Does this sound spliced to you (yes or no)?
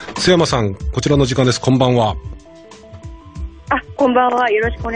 no